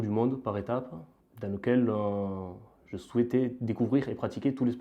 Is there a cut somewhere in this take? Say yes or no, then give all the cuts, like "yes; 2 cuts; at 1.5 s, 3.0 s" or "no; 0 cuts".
no; 0 cuts